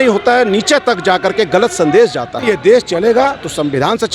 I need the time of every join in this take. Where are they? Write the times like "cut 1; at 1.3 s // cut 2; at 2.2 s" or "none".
cut 1; at 2.4 s